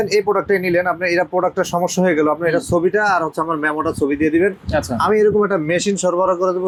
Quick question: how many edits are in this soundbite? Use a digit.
0